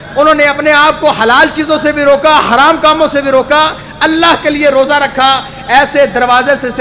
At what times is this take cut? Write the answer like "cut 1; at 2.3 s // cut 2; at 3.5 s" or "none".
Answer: none

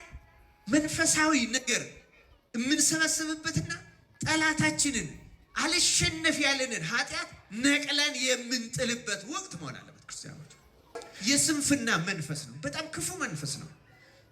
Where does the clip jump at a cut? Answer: cut 1; at 11.1 s

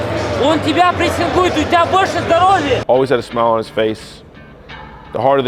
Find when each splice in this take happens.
cut 1; at 2.8 s

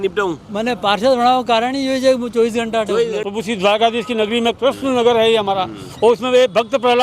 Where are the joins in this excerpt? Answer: cut 1; at 3.1 s

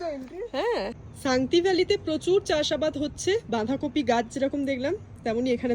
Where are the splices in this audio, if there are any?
cut 1; at 1.0 s

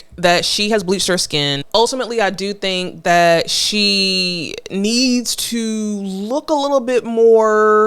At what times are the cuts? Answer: cut 1; at 1.6 s

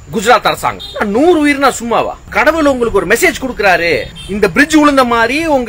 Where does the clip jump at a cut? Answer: cut 1; at 0.8 s // cut 2; at 2.2 s // cut 3; at 4.2 s

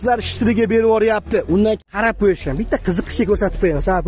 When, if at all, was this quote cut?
cut 1; at 1.9 s

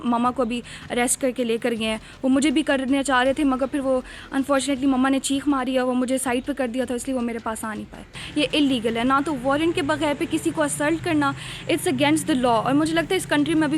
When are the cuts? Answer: cut 1; at 8.2 s

